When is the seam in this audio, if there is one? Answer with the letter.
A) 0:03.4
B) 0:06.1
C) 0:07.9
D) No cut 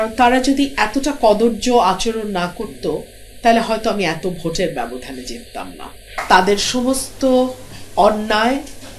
B